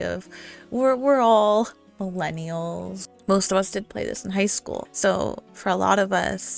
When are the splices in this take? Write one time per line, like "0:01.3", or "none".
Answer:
0:03.0
0:04.9